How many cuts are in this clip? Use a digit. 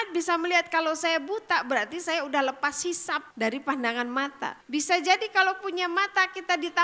2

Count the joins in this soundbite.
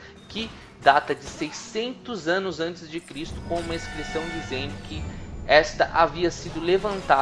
1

